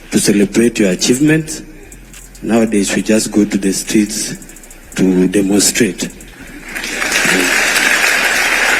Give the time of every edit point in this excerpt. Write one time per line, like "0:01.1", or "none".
0:00.8
0:06.8